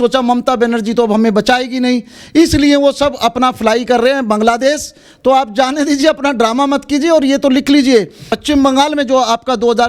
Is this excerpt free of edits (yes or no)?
yes